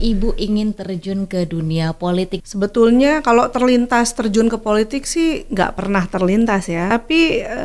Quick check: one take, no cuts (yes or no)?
no